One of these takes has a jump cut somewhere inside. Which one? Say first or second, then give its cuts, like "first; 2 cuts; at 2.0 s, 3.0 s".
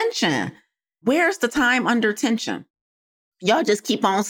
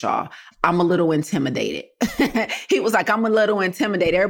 first; 1 cut; at 1.0 s